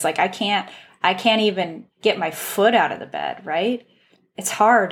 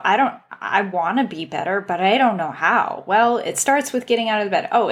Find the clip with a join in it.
first; 1 cut; at 1.8 s

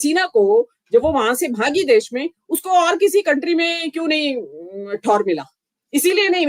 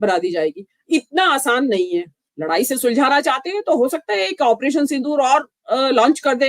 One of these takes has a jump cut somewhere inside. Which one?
second; 1 cut; at 2.2 s

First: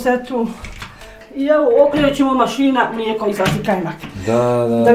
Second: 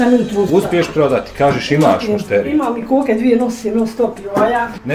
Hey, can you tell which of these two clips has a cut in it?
first; 1 cut; at 1.1 s

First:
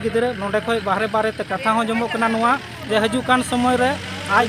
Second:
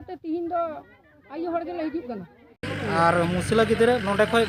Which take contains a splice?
second; 1 cut; at 2.7 s

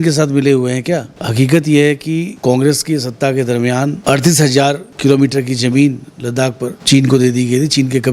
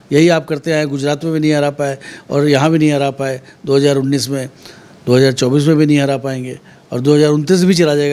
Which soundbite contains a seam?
first; 5 cuts; at 1.2 s, 2.3 s, 4.0 s, 4.9 s, 6.8 s

